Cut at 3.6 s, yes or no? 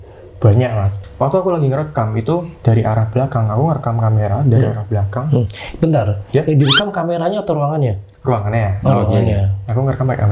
no